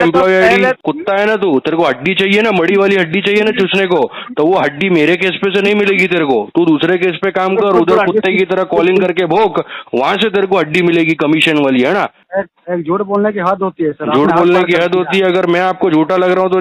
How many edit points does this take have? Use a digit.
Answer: 2